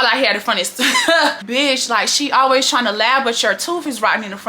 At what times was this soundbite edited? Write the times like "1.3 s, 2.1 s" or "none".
1.4 s